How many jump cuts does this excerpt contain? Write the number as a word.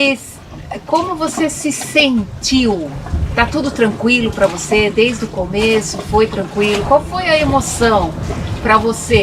one